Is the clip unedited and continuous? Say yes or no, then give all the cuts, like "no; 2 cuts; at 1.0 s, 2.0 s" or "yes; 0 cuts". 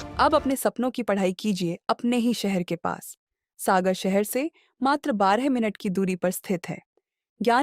yes; 0 cuts